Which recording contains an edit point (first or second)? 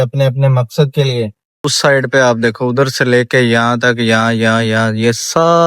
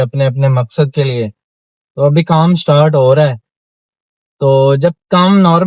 first